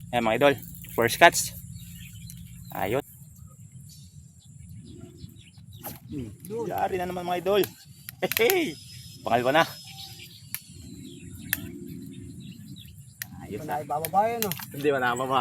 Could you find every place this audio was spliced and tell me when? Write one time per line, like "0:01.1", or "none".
0:03.0